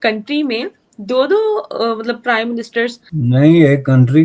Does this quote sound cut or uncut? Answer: cut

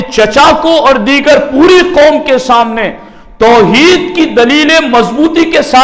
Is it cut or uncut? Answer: uncut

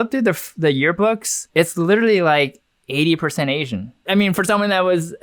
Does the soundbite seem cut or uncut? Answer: cut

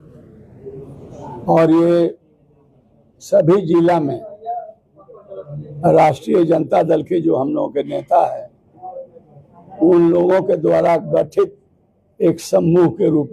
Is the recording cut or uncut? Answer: uncut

